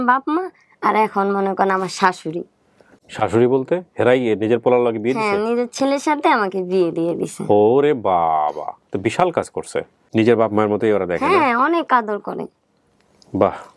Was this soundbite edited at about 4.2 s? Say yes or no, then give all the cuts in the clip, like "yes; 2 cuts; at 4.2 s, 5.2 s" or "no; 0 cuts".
no; 1 cut; at 10.0 s